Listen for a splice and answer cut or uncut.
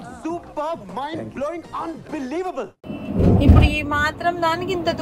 cut